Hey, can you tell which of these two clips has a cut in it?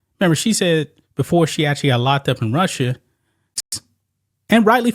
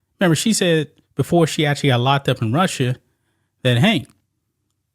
first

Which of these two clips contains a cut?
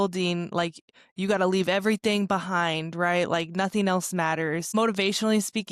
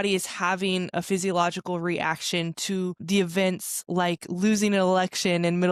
first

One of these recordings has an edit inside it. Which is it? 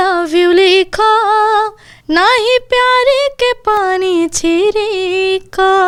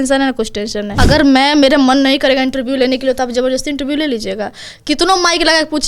second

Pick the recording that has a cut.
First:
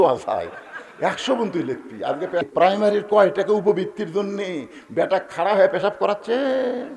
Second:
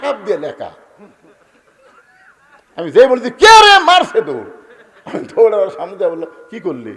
first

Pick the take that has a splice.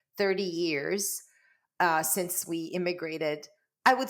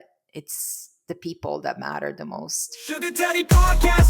second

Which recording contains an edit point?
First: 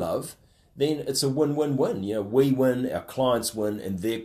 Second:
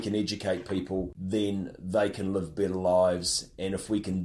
second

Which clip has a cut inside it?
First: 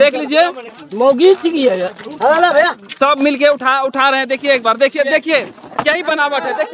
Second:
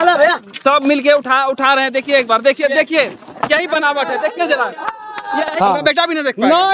second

